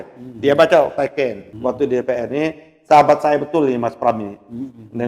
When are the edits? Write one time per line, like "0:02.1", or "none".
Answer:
0:01.5